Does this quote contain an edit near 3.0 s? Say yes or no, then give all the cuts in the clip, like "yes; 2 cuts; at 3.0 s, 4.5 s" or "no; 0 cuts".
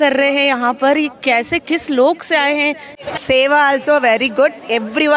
yes; 1 cut; at 3.0 s